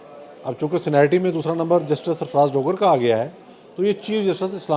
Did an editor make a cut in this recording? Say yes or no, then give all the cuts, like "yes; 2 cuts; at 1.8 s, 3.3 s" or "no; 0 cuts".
no; 0 cuts